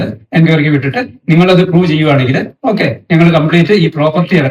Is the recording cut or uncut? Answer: uncut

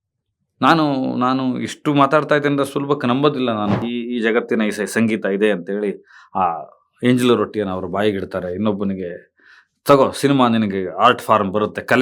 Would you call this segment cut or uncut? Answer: cut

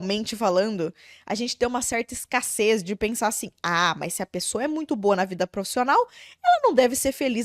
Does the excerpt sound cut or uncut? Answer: uncut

